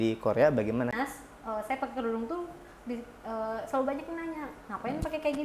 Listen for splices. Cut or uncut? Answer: cut